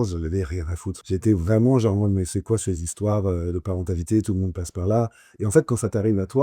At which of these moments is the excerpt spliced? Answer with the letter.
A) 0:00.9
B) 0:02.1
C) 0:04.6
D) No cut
A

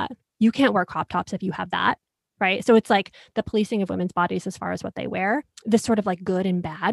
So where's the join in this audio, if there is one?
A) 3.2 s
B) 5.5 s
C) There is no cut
B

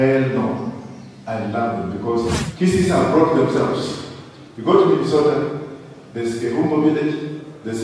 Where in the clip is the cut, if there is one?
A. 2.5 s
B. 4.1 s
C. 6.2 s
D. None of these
A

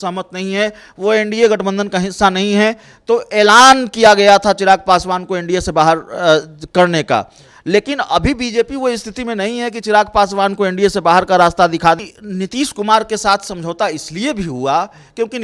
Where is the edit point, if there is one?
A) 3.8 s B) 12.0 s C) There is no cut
B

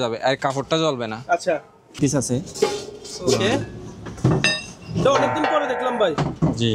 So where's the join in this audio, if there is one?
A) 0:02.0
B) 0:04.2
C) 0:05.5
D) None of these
A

